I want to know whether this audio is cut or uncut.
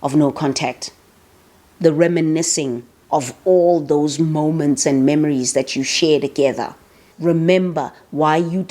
cut